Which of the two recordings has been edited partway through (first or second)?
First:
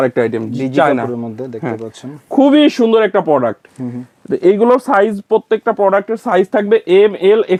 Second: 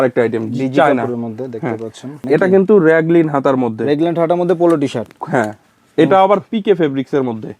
second